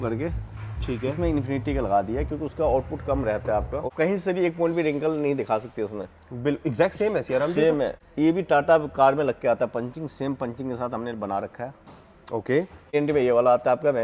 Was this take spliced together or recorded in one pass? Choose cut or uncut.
cut